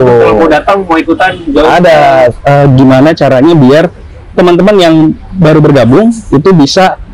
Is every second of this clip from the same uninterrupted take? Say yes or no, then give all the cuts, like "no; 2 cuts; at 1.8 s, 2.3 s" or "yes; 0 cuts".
no; 1 cut; at 2.3 s